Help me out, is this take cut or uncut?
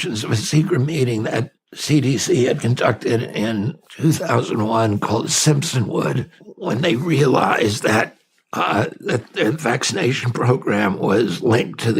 cut